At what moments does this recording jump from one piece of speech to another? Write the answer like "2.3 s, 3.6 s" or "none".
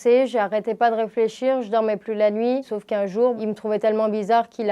3.4 s